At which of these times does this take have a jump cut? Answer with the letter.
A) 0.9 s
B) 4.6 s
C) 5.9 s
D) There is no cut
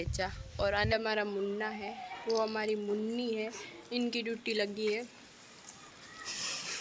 A